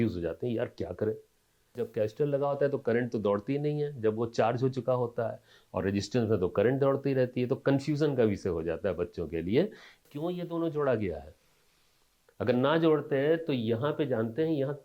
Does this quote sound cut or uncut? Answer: cut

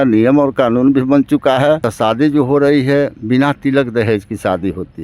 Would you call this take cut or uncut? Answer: cut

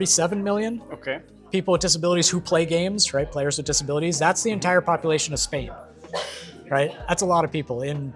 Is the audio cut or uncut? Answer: uncut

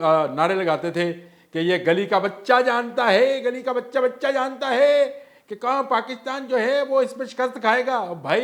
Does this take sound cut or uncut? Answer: uncut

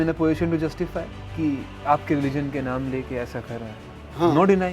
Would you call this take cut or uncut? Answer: cut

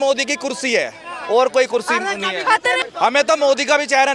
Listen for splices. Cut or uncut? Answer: cut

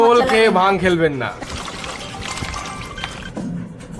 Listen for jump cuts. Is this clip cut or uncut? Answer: cut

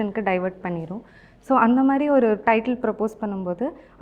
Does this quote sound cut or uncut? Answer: uncut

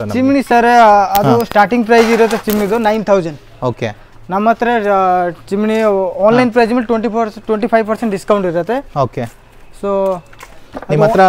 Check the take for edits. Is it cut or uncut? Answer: uncut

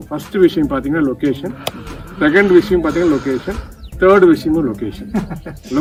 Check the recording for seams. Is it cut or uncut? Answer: uncut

